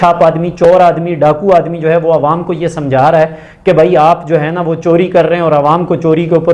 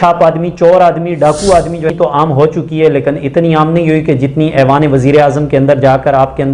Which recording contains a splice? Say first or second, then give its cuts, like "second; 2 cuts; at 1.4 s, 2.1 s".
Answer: second; 1 cut; at 1.9 s